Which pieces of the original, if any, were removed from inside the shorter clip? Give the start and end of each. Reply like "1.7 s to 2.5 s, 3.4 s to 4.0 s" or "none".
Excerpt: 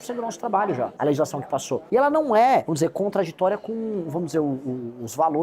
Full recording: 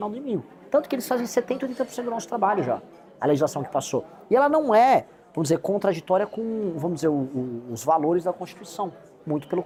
3.1 s to 3.6 s, 5.0 s to 5.3 s